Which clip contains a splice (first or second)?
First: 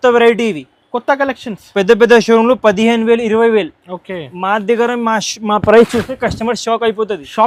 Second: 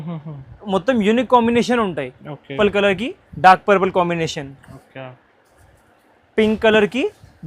second